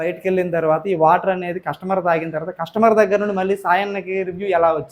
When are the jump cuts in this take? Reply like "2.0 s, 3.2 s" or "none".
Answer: none